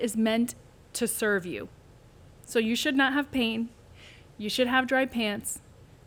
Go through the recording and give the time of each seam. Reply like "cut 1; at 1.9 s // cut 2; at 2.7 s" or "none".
none